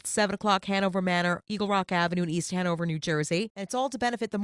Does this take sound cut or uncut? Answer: uncut